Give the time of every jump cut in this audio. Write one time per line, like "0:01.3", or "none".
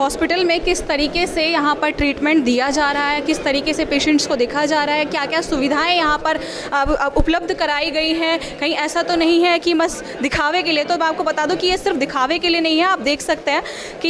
none